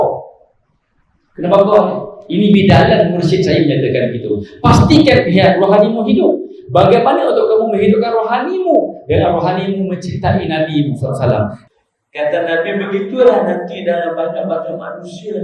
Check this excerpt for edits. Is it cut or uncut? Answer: cut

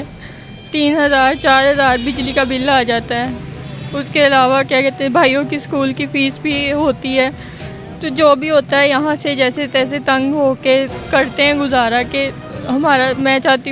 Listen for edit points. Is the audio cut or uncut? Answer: uncut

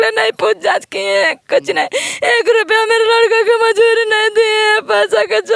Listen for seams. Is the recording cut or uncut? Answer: uncut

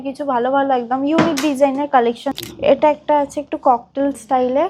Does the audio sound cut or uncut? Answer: cut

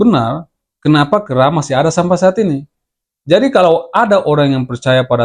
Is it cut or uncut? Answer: uncut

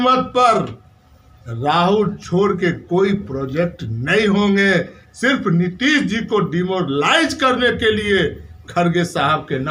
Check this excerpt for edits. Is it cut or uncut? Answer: uncut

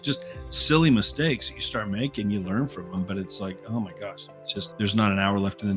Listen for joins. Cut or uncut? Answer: cut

